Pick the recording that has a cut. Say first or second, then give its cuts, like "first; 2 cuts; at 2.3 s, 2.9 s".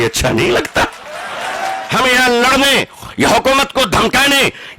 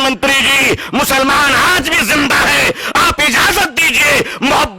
first; 1 cut; at 1.8 s